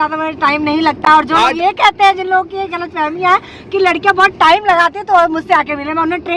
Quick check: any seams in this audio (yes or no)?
yes